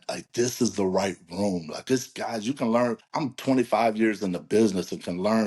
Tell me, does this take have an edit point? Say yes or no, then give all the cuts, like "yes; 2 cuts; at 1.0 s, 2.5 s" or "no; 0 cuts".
yes; 1 cut; at 3.1 s